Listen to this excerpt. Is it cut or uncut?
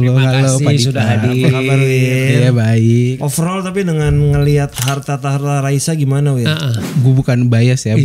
cut